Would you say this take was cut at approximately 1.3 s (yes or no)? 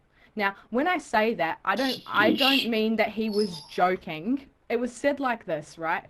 no